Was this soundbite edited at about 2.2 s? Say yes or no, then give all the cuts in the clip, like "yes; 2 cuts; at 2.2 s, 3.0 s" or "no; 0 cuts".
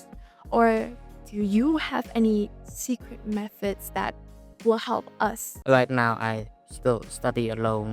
no; 1 cut; at 5.5 s